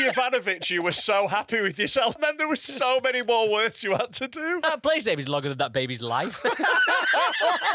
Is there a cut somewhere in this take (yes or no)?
yes